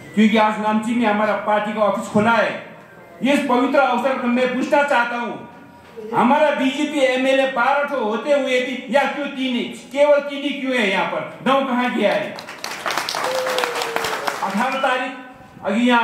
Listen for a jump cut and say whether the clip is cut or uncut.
cut